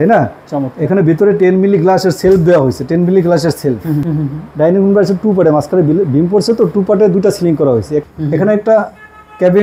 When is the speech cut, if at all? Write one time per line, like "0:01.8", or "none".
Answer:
0:04.1
0:08.0

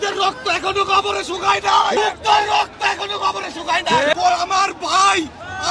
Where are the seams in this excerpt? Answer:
0:01.9
0:04.1

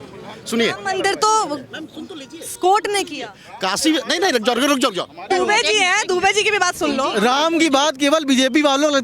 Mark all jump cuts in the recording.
0:05.3

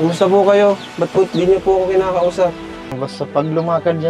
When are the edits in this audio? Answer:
0:03.0

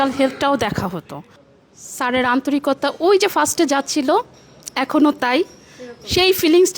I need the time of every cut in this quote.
0:01.4

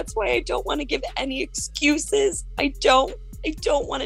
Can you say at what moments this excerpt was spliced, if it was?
none

